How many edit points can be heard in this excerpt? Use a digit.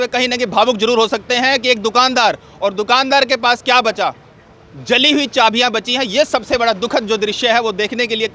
0